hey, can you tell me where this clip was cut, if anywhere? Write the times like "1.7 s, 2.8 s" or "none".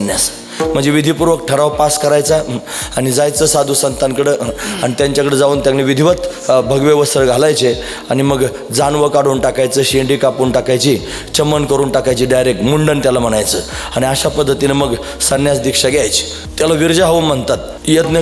none